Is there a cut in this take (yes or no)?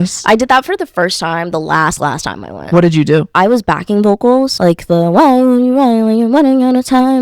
yes